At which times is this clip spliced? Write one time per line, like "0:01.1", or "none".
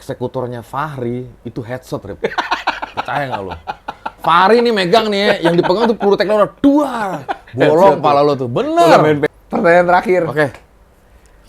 0:09.2